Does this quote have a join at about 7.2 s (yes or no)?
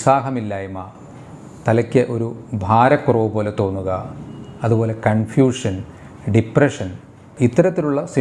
yes